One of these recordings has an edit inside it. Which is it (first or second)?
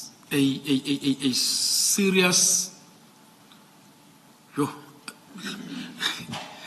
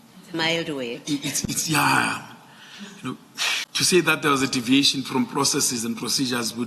second